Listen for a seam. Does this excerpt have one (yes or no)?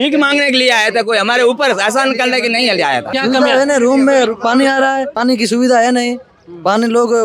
yes